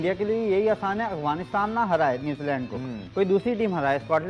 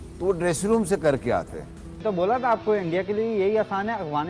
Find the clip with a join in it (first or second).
second